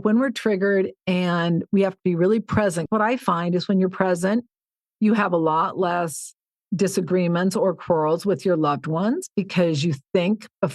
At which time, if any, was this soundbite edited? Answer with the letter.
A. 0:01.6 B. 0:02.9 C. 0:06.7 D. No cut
B